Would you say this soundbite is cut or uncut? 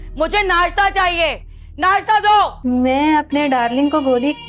cut